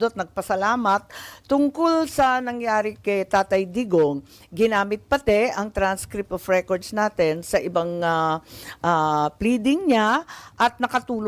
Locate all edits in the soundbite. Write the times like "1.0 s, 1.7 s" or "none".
none